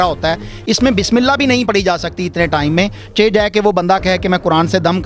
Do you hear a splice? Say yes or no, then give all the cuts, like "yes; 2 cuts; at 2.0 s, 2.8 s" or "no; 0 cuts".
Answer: no; 0 cuts